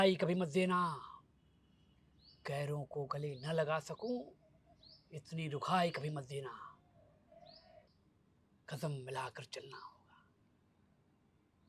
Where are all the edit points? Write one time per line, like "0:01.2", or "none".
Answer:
0:07.9